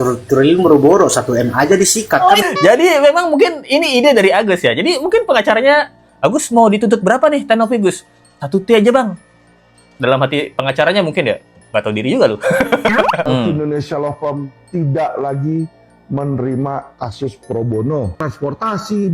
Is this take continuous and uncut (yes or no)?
no